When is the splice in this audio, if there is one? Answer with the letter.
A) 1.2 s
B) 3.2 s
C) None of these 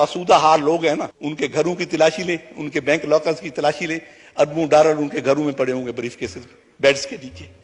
A